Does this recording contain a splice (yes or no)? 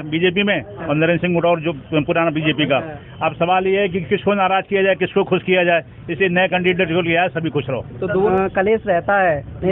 yes